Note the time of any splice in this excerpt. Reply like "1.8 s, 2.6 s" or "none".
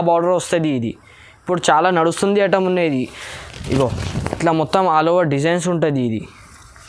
none